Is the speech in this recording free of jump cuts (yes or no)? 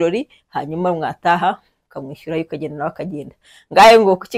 yes